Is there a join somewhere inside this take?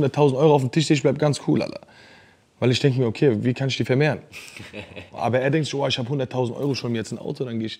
no; 0 cuts

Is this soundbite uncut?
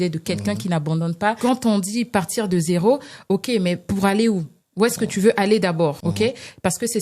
no; 2 cuts; at 1.4 s, 6.0 s

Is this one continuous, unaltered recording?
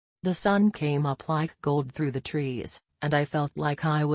no; 1 cut; at 2.8 s

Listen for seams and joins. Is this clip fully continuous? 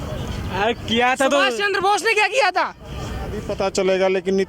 no; 1 cut; at 3.4 s

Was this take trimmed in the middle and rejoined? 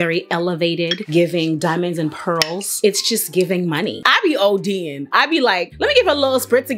yes; 1 cut; at 4.0 s

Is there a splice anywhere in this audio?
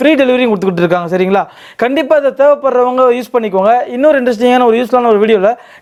no; 0 cuts

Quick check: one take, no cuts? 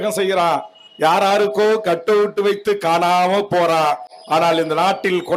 yes; 0 cuts

